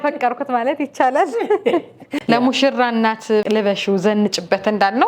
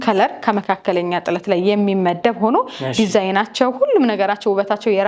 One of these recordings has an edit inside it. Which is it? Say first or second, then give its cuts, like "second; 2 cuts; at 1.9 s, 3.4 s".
first; 2 cuts; at 2.1 s, 3.4 s